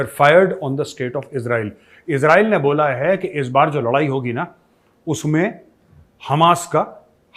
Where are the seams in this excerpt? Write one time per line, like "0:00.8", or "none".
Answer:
none